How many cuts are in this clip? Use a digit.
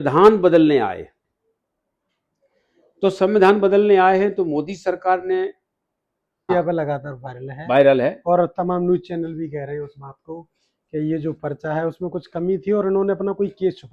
1